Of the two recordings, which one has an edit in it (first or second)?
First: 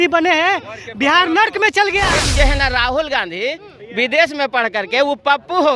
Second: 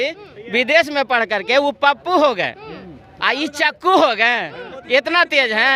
first